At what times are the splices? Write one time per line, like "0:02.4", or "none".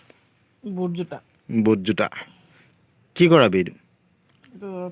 none